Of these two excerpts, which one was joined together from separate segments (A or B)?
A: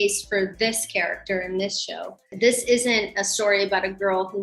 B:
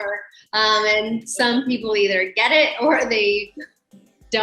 A